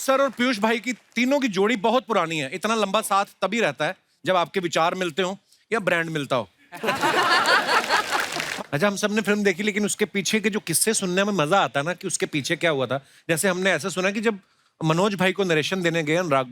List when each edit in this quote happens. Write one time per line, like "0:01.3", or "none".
0:08.4